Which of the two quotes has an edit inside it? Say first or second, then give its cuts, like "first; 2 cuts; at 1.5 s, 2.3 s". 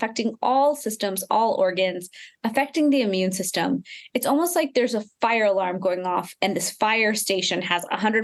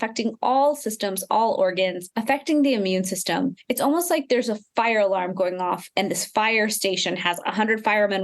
second; 2 cuts; at 2.1 s, 3.6 s